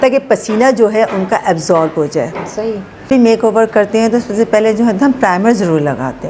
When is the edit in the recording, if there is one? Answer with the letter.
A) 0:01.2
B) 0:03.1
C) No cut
B